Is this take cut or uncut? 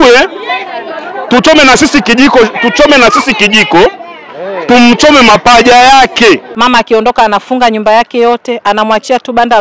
cut